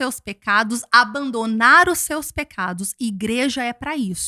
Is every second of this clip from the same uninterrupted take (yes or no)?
yes